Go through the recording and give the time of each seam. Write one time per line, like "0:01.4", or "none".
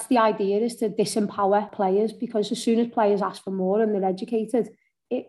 0:01.7